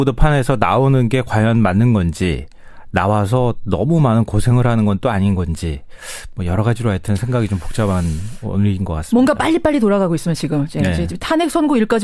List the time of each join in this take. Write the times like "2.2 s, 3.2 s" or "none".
none